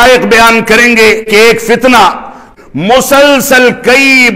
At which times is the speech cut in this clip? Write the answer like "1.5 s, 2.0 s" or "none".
1.3 s, 2.4 s